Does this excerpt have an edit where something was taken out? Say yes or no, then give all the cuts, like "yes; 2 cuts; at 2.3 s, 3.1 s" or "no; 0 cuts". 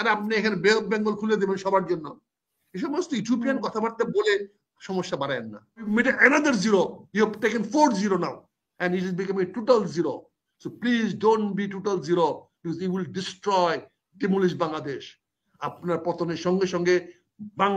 yes; 1 cut; at 5.9 s